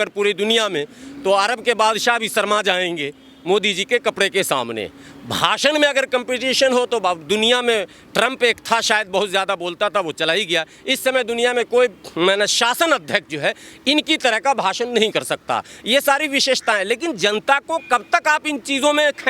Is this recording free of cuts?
yes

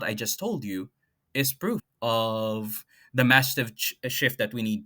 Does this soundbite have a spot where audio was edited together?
yes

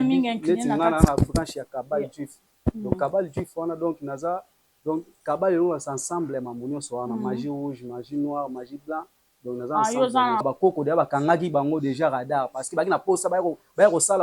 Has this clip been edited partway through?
yes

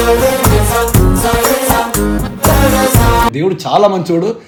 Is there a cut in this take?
no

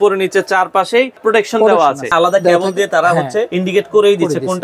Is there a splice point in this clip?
yes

